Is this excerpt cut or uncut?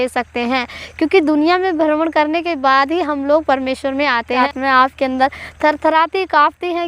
cut